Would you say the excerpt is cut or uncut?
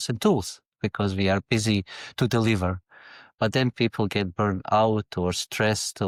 uncut